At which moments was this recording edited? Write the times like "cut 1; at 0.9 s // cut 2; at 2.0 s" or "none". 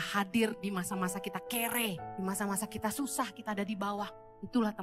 cut 1; at 2.1 s